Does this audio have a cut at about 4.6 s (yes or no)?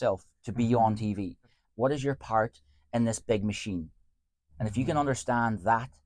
no